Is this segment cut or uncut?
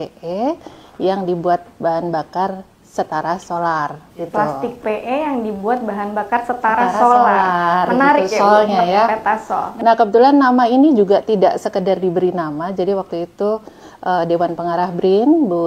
uncut